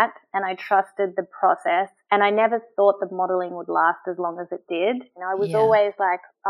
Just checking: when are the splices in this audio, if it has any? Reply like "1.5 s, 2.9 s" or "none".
5.1 s